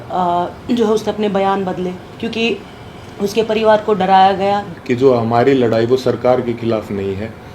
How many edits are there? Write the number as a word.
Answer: one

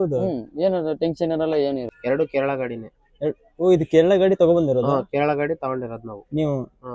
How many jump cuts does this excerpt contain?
one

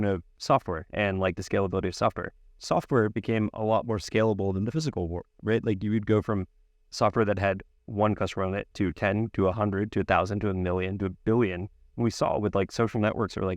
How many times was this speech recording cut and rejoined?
two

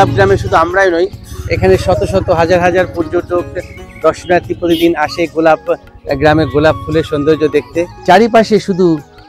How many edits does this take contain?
one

